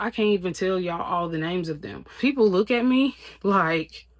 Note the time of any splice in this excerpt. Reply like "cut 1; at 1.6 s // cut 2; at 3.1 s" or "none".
cut 1; at 2.1 s